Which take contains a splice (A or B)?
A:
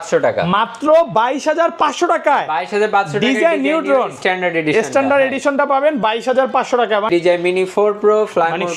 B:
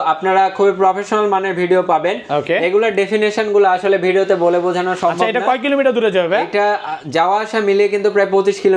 A